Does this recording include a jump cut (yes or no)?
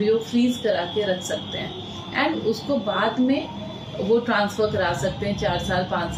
no